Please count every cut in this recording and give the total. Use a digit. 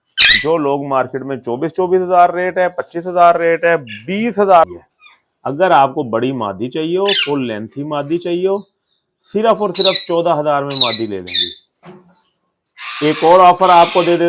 1